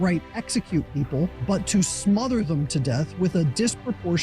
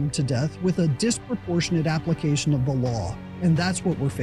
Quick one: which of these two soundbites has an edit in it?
first; 1 cut; at 1.4 s

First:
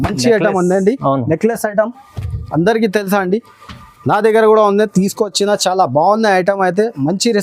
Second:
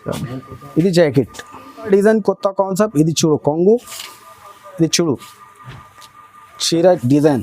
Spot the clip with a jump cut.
second; 1 cut; at 1.9 s

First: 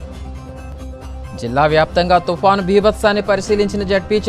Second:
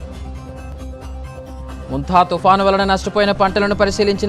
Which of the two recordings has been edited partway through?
first; 1 cut; at 1.1 s

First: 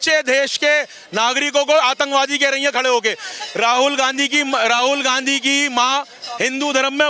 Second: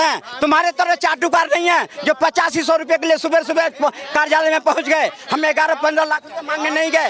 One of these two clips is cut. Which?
first; 1 cut; at 6.2 s

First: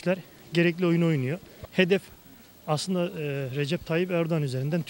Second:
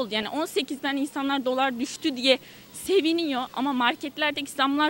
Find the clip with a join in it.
first; 1 cut; at 1.5 s

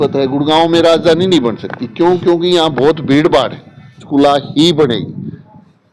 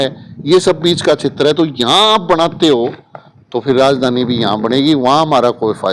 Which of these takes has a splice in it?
first; 1 cut; at 4.0 s

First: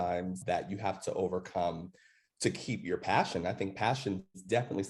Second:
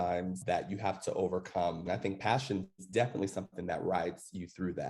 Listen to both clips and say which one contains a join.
second; 1 cut; at 1.9 s

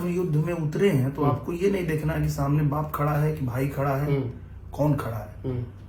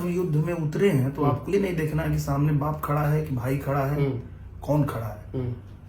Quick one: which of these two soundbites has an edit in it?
second; 1 cut; at 1.5 s

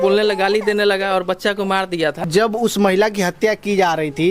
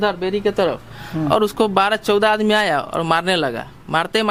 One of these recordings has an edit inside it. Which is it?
first; 1 cut; at 2.2 s

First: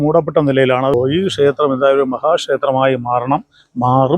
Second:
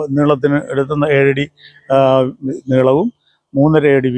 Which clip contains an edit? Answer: first; 1 cut; at 0.9 s

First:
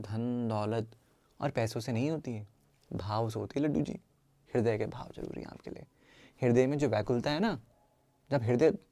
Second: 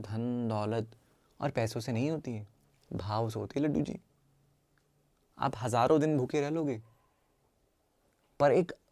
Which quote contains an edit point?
first; 1 cut; at 4.4 s

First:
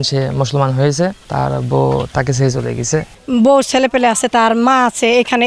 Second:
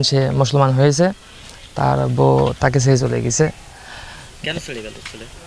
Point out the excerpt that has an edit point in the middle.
first; 2 cuts; at 1.2 s, 3.1 s

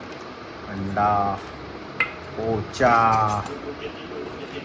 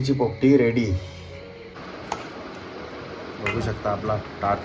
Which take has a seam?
second; 1 cut; at 1.7 s

